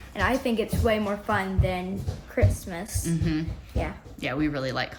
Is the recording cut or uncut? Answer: uncut